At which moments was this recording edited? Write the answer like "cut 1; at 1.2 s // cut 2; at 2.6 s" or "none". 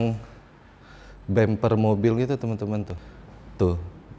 cut 1; at 3.0 s